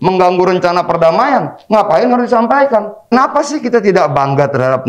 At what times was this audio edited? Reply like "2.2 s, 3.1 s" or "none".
3.1 s